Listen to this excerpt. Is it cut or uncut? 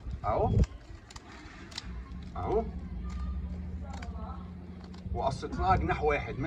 uncut